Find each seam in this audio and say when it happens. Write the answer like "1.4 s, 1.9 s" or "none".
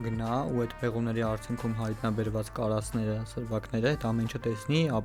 none